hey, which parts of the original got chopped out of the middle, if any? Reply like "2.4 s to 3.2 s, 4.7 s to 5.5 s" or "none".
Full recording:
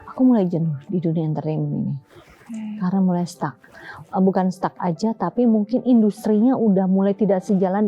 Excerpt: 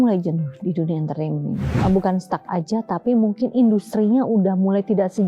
2.0 s to 4.0 s